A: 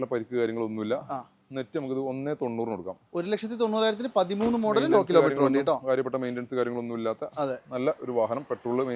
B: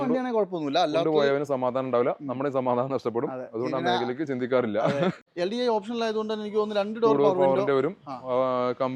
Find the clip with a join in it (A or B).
B